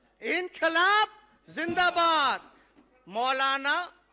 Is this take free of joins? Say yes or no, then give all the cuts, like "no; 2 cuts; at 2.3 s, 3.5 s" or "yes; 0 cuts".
yes; 0 cuts